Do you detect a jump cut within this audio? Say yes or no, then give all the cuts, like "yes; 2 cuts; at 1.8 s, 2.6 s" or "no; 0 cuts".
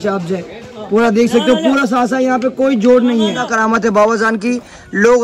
yes; 1 cut; at 3.5 s